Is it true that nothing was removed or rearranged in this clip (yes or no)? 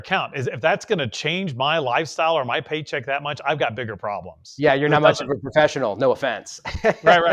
yes